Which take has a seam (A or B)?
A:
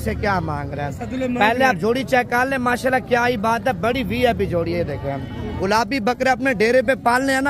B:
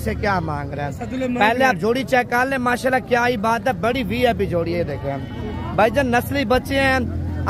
A